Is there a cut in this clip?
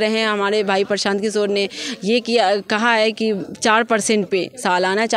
no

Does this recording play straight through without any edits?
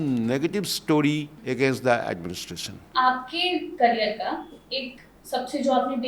no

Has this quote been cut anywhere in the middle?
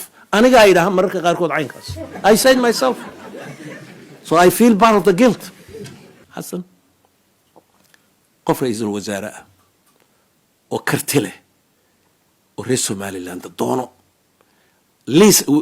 yes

